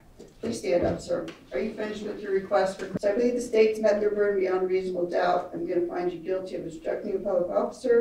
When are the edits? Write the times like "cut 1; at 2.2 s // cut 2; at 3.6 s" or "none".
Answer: cut 1; at 2.9 s

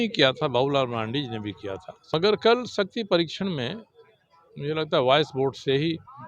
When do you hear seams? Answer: cut 1; at 1.9 s

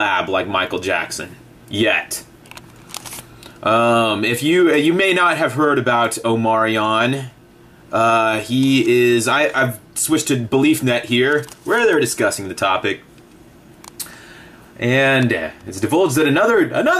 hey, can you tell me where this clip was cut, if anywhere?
cut 1; at 5.6 s

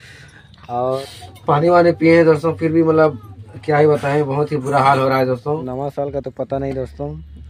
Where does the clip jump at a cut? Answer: cut 1; at 1.0 s // cut 2; at 5.7 s

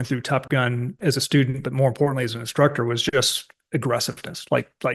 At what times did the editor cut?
none

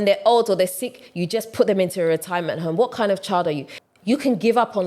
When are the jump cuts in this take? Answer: cut 1; at 3.7 s

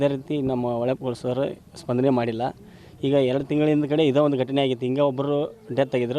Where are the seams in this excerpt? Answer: none

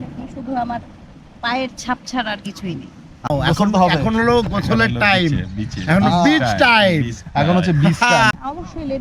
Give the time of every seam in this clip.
cut 1; at 3.3 s // cut 2; at 8.3 s

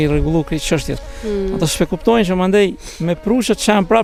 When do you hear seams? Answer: none

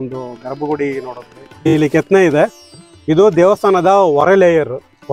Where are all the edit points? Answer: cut 1; at 1.7 s

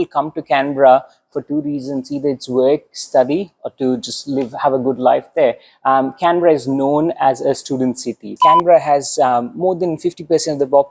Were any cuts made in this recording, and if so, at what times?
cut 1; at 8.2 s

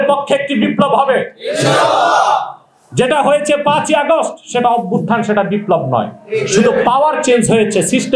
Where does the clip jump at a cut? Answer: none

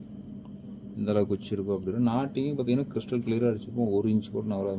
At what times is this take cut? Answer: none

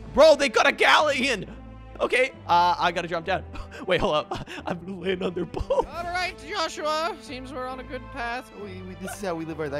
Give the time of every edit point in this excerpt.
cut 1; at 1.9 s // cut 2; at 6.0 s

